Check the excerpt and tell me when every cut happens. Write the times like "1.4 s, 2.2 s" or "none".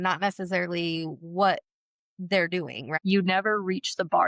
2.9 s

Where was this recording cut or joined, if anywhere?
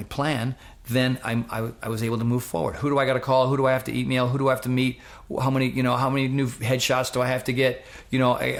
none

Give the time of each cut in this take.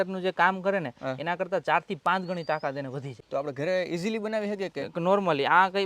3.2 s

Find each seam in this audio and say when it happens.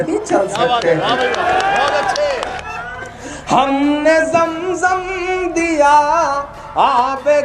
2.4 s

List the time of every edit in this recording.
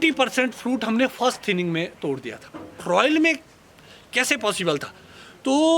2.8 s

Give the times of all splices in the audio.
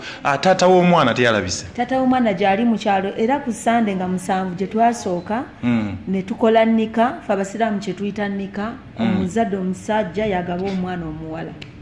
none

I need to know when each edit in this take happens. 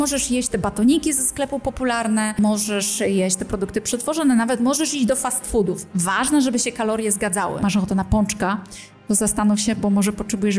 2.4 s, 7.6 s

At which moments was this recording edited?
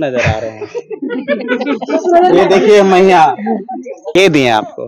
4.0 s

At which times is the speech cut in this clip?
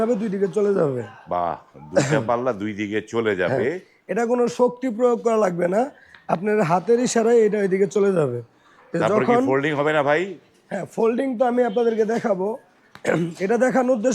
none

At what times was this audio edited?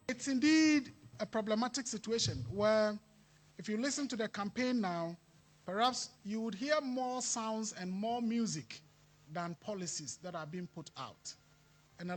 none

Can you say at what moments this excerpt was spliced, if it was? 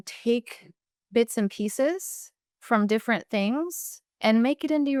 none

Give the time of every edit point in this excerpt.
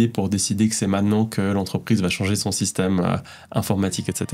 none

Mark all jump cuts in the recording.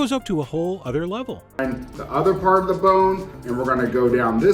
1.4 s

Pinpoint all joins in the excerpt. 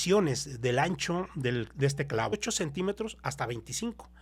2.3 s

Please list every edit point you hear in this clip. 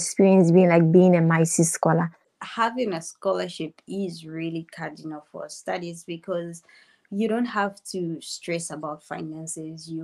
2.2 s

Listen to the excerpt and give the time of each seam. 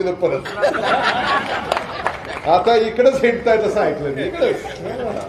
none

